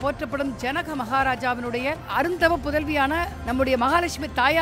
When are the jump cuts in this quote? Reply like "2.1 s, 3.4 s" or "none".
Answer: 2.0 s, 3.3 s